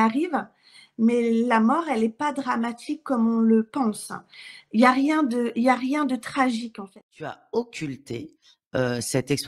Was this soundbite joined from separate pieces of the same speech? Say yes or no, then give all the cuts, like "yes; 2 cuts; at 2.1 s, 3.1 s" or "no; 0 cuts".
yes; 1 cut; at 6.8 s